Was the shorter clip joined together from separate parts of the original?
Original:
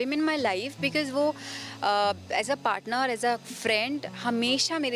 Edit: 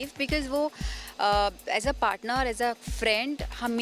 no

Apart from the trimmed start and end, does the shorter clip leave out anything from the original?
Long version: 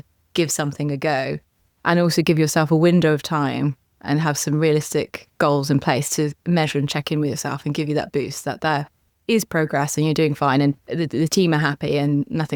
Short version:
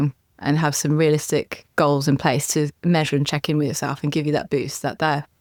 no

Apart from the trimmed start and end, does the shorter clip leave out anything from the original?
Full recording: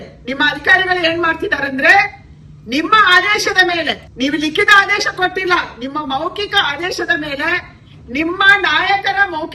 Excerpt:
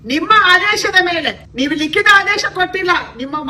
no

